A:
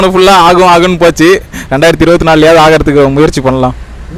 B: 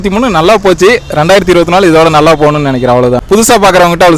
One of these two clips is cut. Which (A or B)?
B